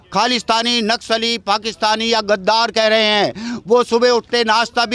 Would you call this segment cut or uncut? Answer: uncut